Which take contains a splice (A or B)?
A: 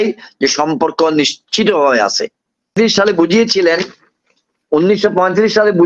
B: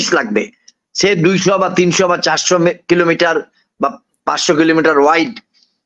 A